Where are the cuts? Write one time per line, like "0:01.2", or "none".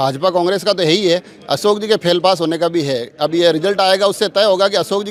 none